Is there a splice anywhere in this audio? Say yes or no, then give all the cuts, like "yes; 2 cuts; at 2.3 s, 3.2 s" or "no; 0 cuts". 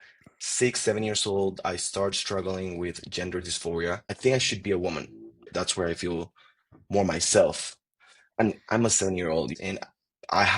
yes; 3 cuts; at 4.1 s, 5.5 s, 9.5 s